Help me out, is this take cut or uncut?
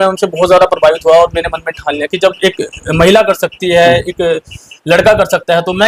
uncut